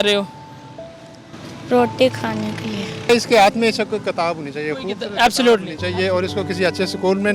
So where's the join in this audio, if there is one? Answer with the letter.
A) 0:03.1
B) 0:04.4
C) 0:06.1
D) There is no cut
A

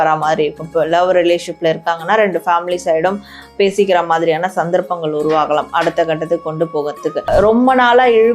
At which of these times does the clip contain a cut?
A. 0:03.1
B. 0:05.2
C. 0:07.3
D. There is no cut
C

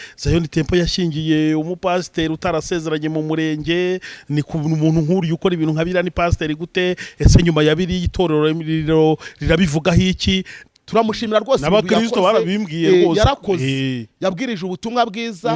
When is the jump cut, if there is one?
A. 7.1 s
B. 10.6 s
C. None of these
B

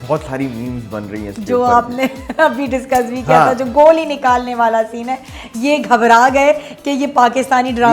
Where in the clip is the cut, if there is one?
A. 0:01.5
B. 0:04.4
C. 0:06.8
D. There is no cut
D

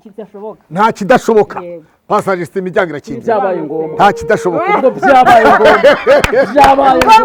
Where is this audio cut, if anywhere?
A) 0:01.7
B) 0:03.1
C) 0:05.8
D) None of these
D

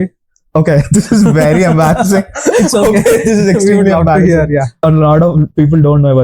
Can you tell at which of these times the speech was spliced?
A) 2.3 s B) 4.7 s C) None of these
B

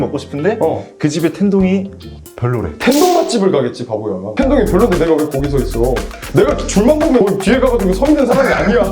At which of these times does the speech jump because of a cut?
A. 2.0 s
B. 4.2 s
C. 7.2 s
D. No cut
D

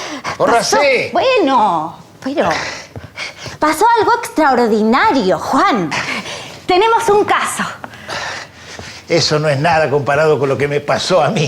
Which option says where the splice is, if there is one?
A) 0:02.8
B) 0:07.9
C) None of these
A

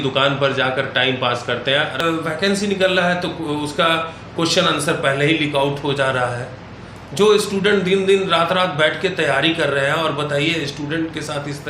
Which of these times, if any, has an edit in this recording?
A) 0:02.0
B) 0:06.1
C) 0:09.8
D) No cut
A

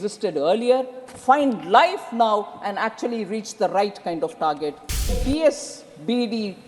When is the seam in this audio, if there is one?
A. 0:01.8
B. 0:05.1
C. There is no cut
B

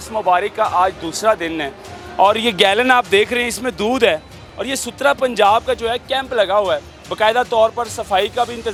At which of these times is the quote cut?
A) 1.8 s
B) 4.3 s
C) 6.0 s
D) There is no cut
D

